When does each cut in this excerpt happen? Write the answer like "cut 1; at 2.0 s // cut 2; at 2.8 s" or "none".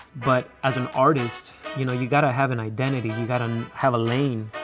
none